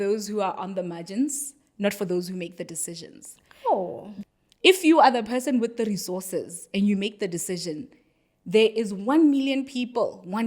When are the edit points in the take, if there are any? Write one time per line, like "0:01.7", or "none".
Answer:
0:04.1